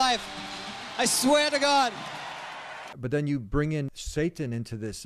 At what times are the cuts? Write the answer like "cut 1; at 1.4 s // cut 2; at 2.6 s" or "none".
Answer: cut 1; at 2.8 s // cut 2; at 4.0 s